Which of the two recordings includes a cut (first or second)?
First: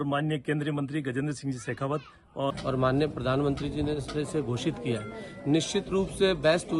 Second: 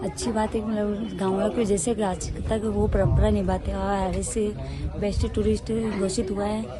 first